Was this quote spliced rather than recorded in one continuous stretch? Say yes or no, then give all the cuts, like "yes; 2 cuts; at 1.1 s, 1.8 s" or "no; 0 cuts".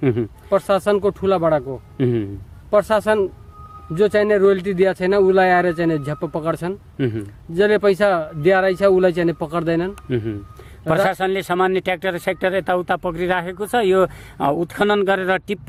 no; 0 cuts